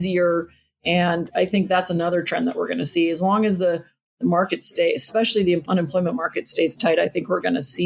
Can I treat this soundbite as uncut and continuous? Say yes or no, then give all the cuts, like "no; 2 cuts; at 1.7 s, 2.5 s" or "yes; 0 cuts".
no; 1 cut; at 5.6 s